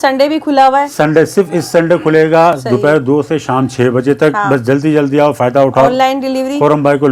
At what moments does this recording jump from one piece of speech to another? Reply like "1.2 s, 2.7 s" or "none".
none